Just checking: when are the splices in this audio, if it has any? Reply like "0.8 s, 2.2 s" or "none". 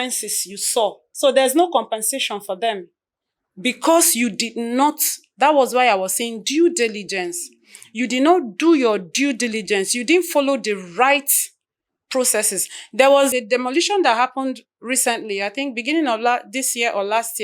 1.1 s, 13.3 s